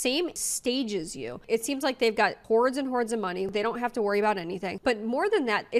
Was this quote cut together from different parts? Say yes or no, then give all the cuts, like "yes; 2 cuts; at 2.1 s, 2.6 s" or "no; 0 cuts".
no; 0 cuts